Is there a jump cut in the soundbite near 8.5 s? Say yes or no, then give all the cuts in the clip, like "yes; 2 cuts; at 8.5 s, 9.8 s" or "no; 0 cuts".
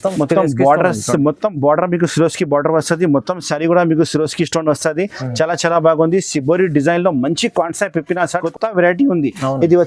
yes; 1 cut; at 8.5 s